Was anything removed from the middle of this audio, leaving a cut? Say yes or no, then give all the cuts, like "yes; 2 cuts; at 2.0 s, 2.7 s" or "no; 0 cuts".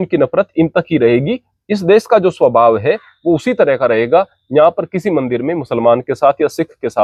no; 0 cuts